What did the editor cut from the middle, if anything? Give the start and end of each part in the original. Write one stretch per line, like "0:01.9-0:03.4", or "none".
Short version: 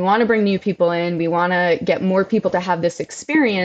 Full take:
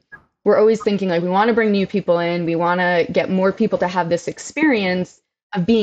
none